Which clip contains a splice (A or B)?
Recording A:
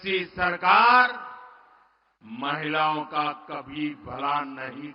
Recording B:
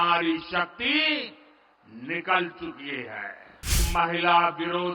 B